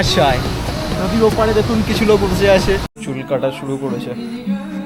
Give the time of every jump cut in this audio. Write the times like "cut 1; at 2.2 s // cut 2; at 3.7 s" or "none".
cut 1; at 3.0 s